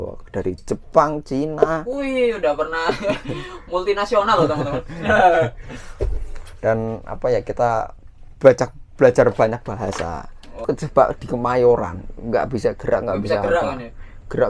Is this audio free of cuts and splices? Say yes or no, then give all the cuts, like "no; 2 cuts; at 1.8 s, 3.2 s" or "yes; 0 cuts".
no; 1 cut; at 10.7 s